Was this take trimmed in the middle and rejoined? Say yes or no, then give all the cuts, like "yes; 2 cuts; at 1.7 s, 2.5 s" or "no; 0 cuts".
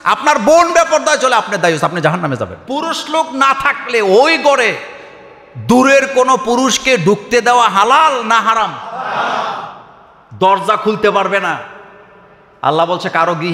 yes; 1 cut; at 2.6 s